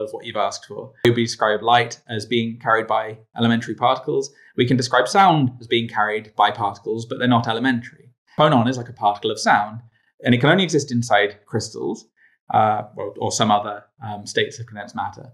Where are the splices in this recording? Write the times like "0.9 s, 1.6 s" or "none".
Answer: 1.0 s, 8.2 s